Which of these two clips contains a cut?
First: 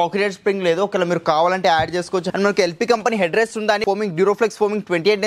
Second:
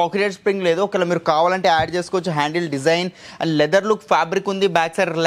first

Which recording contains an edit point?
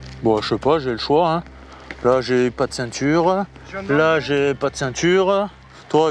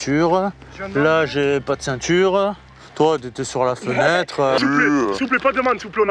second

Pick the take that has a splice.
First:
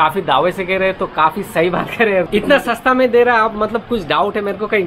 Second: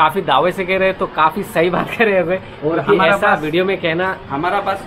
first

